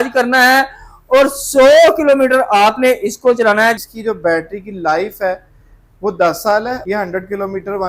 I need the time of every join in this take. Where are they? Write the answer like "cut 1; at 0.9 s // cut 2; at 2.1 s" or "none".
cut 1; at 3.8 s // cut 2; at 6.8 s